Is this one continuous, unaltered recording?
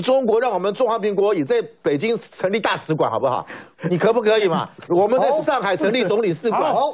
yes; 0 cuts

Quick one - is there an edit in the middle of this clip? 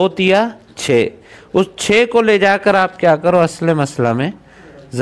no; 0 cuts

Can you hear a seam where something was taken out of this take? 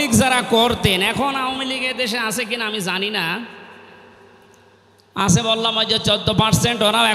no; 0 cuts

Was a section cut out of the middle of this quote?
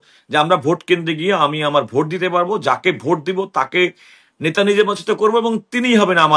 no; 0 cuts

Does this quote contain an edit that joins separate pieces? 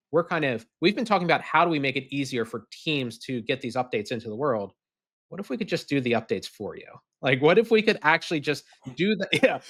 no; 0 cuts

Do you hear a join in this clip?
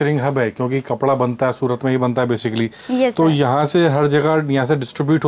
no; 0 cuts

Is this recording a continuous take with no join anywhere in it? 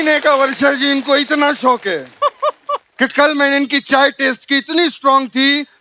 yes; 0 cuts

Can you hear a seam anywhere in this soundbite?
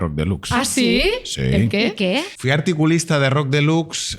yes; 1 cut; at 2.3 s

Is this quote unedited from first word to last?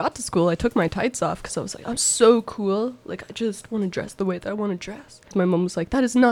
no; 1 cut; at 5.2 s

